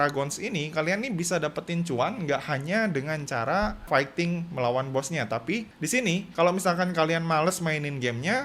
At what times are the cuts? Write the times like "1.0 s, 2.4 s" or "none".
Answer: 3.9 s